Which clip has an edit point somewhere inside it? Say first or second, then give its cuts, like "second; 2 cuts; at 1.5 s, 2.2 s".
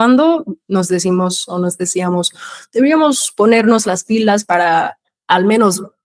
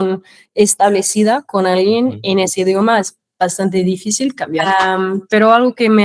second; 1 cut; at 4.6 s